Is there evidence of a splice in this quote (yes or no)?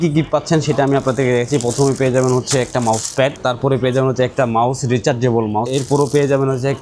yes